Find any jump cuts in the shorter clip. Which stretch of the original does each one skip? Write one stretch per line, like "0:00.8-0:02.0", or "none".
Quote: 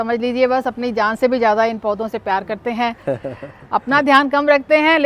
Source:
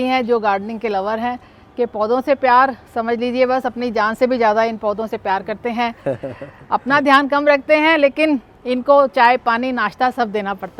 none